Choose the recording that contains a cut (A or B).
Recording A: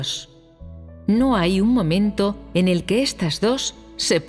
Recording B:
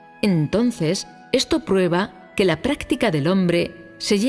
A